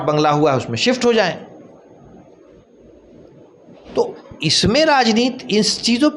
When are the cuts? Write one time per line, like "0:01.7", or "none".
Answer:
none